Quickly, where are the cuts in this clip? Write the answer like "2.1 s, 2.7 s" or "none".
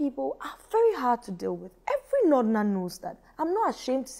none